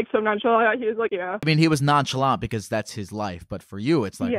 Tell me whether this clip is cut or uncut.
cut